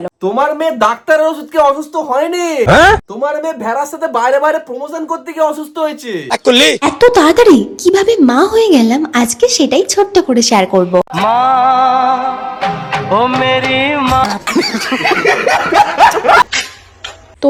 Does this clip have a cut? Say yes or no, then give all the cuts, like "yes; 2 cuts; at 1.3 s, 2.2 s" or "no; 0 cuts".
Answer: no; 0 cuts